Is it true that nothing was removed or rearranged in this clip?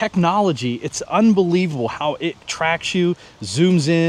yes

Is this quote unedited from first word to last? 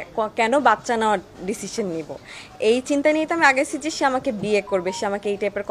yes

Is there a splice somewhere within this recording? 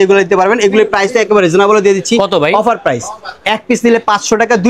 no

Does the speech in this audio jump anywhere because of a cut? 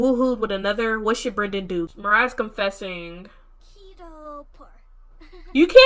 yes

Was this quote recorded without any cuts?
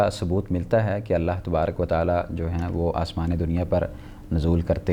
yes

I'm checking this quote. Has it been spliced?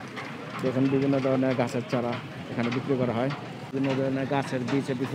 yes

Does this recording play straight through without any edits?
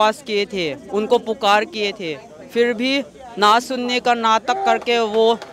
yes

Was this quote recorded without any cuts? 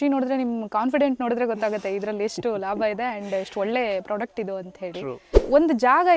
no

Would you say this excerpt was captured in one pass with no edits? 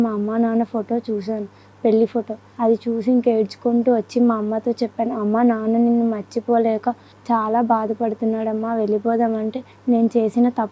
no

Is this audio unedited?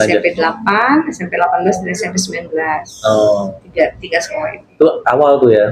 yes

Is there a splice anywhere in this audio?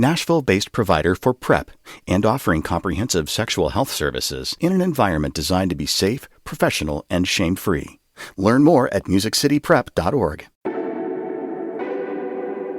yes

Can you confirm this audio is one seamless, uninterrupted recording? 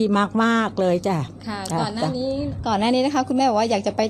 yes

